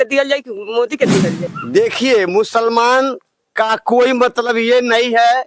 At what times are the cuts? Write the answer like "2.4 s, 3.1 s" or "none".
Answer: 1.4 s